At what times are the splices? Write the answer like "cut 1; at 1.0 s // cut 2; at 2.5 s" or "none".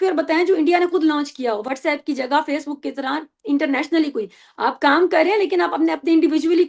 none